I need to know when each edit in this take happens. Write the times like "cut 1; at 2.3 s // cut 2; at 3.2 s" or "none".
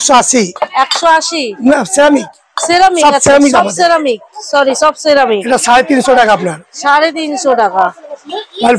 cut 1; at 1.5 s